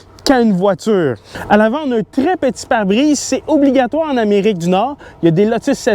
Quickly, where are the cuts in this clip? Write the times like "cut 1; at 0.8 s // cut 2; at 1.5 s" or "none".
none